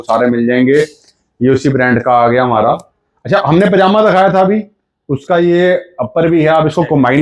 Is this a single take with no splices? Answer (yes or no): yes